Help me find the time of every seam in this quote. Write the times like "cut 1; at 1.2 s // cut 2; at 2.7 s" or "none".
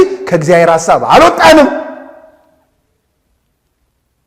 none